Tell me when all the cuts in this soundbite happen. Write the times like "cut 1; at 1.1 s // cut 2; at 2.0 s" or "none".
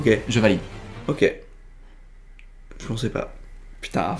none